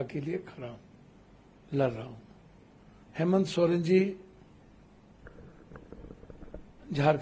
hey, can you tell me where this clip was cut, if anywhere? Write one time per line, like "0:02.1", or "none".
none